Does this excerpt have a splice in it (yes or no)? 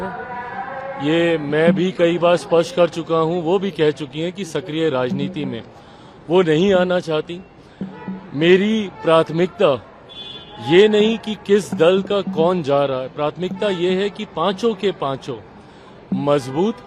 no